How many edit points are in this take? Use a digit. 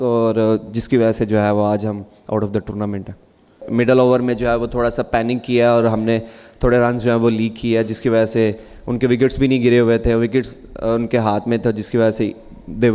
1